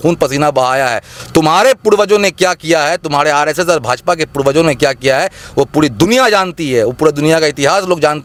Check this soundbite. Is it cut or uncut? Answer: uncut